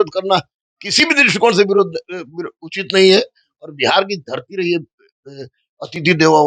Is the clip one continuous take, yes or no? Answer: yes